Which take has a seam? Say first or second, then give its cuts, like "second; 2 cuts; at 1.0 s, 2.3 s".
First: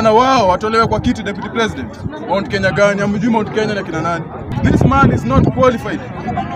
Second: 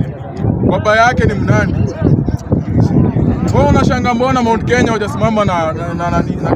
first; 1 cut; at 4.5 s